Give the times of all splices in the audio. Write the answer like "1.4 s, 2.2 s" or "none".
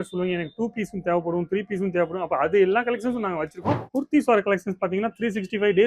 3.8 s